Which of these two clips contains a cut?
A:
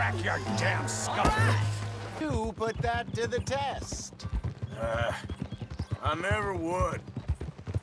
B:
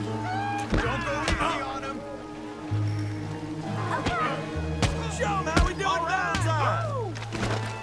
A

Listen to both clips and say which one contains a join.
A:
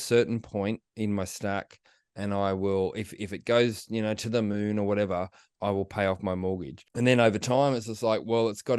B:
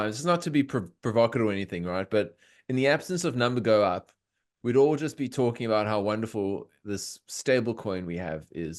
A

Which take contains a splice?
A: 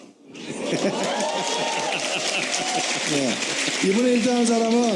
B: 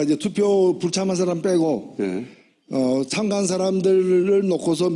B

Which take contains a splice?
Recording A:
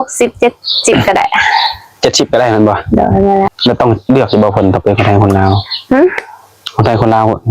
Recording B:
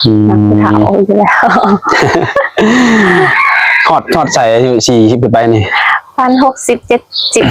A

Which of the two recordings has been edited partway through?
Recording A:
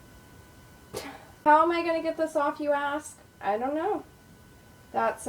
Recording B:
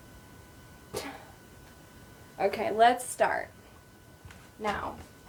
A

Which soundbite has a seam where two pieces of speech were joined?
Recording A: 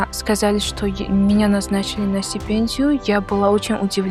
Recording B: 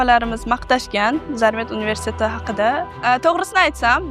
B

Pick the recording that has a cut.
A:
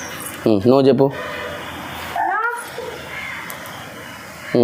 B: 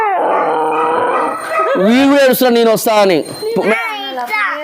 B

